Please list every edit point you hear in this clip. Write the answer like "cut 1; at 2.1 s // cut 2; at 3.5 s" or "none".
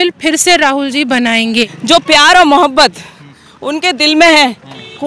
cut 1; at 1.8 s